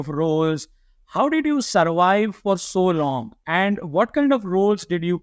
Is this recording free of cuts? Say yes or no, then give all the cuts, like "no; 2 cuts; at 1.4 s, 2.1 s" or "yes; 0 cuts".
yes; 0 cuts